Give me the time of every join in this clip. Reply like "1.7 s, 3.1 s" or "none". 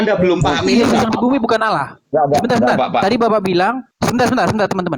3.9 s